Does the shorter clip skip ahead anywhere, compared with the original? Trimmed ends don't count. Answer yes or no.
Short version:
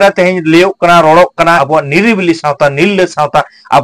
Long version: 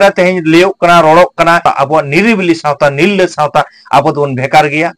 yes